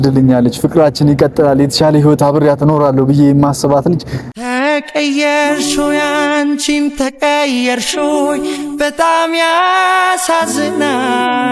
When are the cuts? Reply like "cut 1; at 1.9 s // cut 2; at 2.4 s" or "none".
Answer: none